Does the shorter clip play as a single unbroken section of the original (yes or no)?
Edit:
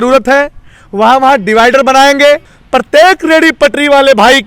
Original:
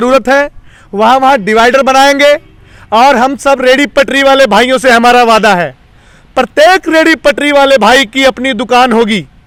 no